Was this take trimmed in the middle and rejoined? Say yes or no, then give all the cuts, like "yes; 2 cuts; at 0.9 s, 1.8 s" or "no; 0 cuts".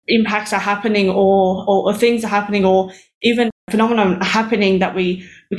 yes; 1 cut; at 3.6 s